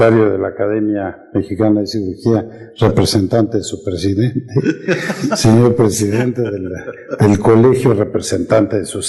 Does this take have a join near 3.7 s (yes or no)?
yes